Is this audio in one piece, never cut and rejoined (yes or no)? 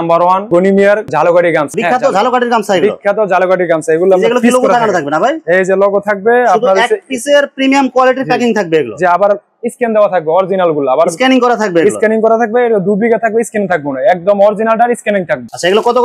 yes